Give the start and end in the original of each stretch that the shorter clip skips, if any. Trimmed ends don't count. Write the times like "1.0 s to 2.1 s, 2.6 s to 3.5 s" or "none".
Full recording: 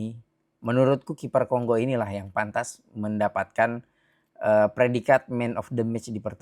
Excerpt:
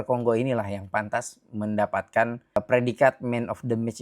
4.0 s to 4.6 s

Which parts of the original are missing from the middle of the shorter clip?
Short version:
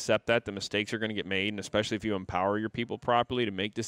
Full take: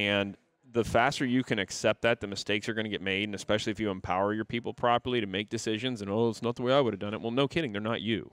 none

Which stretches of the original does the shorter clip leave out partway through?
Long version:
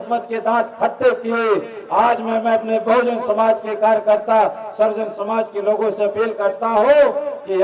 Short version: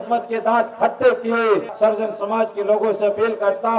1.7 s to 4.7 s

